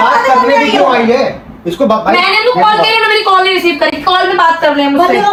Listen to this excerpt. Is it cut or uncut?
uncut